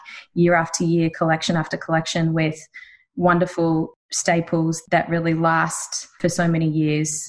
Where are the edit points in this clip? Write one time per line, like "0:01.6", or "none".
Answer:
0:03.9
0:04.8
0:06.1